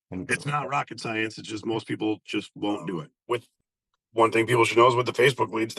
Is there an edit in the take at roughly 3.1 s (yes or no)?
yes